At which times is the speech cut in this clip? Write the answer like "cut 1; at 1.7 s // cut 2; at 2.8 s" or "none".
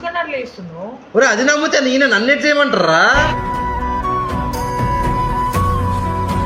none